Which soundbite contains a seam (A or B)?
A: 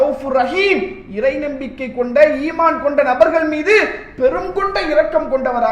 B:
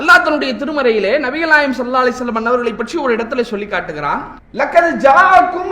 B